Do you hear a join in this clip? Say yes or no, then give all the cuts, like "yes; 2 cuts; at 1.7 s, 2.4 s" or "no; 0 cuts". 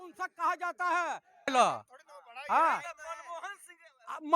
yes; 1 cut; at 1.5 s